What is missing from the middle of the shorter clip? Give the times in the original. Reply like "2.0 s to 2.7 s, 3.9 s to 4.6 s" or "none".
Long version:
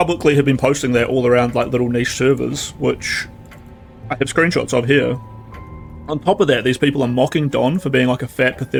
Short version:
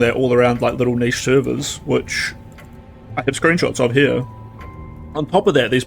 none